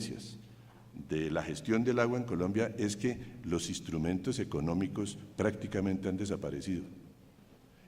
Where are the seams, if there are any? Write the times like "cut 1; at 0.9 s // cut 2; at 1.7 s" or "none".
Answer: cut 1; at 6.4 s